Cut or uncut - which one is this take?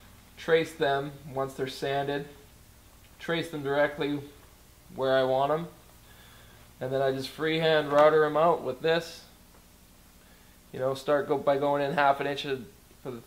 uncut